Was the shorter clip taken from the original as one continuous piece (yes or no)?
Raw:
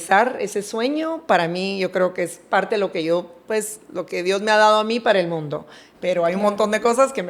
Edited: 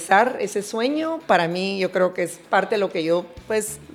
yes